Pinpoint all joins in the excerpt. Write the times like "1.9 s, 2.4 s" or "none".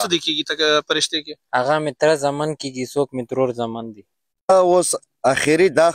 4.5 s